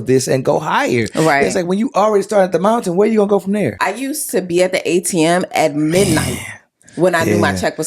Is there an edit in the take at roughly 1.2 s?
no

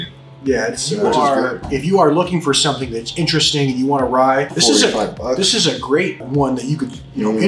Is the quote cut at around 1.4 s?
yes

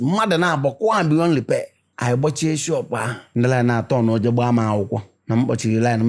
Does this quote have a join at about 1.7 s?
yes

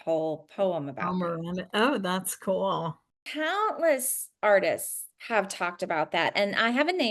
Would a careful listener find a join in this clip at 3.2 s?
yes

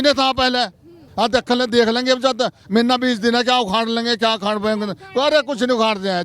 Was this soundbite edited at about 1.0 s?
yes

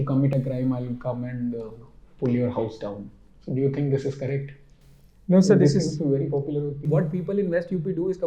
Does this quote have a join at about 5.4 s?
no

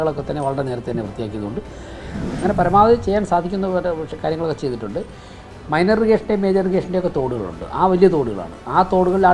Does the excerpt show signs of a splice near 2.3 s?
yes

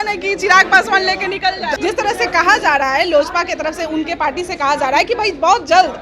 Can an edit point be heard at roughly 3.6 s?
no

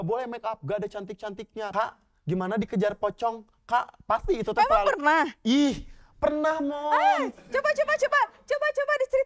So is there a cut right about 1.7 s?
yes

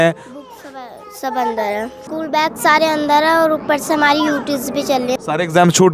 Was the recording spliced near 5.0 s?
yes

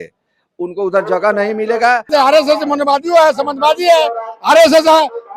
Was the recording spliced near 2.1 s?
yes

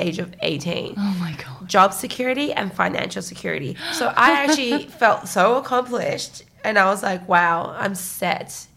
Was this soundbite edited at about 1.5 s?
yes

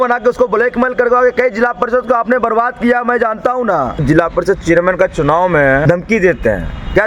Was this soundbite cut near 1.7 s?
no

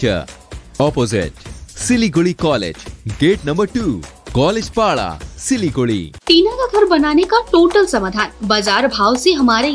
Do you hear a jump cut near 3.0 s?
no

